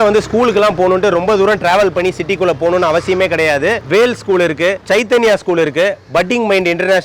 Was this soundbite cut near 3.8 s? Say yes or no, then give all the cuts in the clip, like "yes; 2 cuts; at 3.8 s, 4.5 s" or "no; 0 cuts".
yes; 1 cut; at 3.8 s